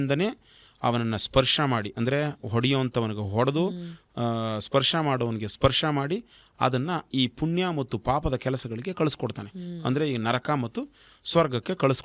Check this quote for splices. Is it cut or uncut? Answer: uncut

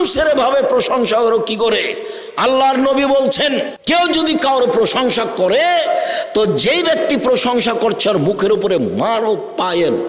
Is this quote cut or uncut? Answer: cut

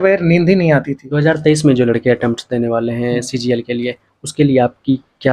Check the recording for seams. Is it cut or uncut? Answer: cut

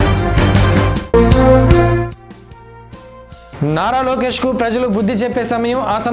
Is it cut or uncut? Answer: cut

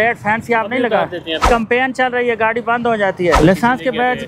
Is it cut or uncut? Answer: cut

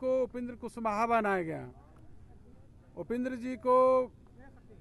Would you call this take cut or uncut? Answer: uncut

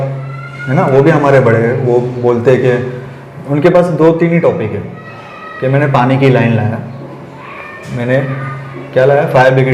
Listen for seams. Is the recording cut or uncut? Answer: uncut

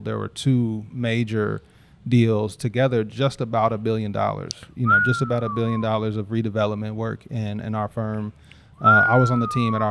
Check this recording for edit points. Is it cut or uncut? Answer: uncut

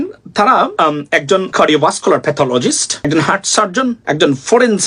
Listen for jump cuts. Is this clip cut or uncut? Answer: cut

